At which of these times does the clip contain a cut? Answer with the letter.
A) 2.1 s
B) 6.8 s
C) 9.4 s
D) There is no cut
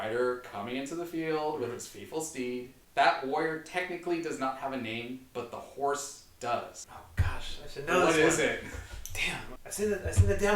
C